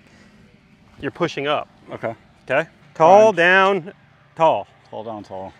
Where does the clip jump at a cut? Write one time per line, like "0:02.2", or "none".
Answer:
none